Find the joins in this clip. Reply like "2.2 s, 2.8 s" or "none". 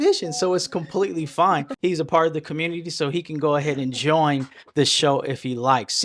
1.7 s

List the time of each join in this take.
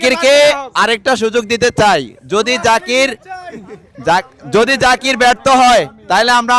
none

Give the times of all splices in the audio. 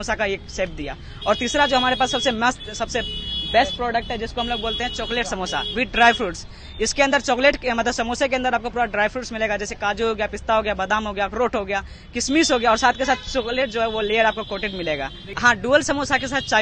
15.2 s

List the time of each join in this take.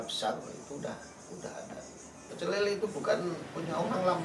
2.3 s

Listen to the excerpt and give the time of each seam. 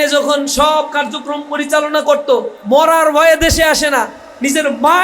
2.6 s

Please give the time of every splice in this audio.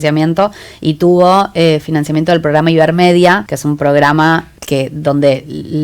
3.5 s, 4.5 s

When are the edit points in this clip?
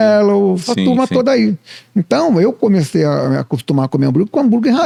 none

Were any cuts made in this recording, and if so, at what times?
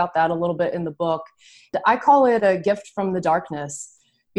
none

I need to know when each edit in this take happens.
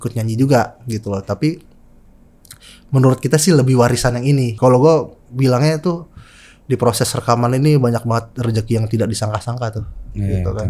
4.5 s

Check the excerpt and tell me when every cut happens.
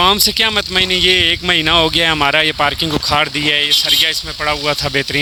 none

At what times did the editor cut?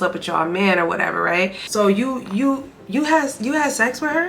1.6 s

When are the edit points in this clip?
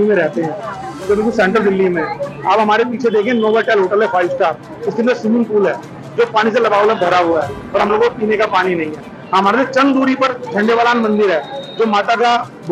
none

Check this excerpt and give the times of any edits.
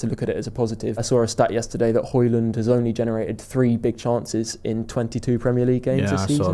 1.0 s

